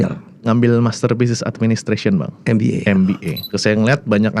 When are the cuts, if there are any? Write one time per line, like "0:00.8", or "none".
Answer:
0:03.3